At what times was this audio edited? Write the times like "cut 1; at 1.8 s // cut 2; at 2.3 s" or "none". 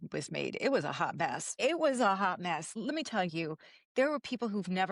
cut 1; at 1.5 s // cut 2; at 2.7 s